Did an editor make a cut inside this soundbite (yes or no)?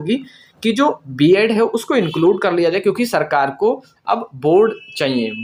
no